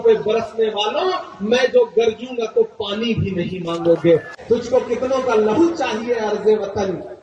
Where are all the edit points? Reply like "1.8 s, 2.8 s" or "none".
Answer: 4.3 s